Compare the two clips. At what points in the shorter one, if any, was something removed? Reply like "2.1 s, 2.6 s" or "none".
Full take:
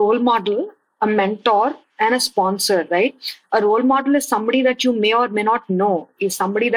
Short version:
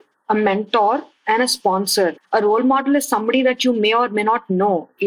2.1 s